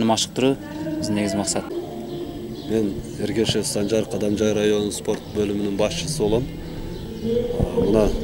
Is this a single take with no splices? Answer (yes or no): no